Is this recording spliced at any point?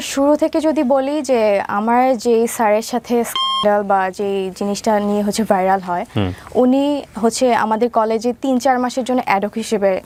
no; 0 cuts

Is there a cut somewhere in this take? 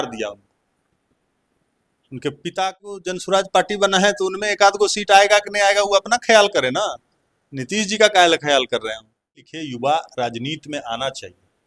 yes; 2 cuts; at 3.0 s, 9.5 s

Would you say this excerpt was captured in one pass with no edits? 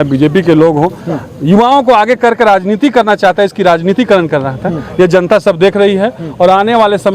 yes; 0 cuts

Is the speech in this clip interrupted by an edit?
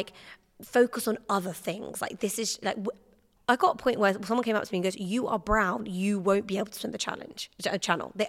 no; 0 cuts

